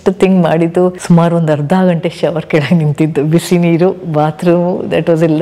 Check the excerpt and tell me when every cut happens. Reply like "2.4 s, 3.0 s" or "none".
none